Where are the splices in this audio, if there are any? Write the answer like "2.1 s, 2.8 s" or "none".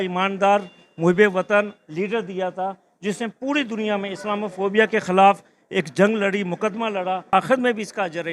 7.3 s